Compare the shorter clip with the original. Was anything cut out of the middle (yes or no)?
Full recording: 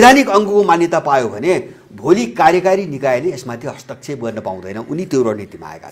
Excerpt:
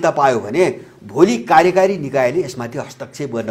no